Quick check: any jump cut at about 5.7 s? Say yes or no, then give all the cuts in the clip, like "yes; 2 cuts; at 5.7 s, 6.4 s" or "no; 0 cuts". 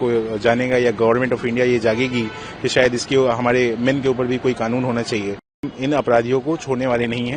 yes; 1 cut; at 5.7 s